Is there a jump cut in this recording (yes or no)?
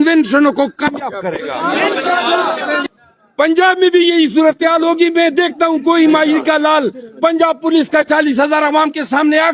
yes